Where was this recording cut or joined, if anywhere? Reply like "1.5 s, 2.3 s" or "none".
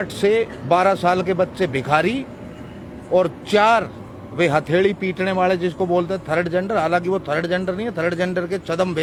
none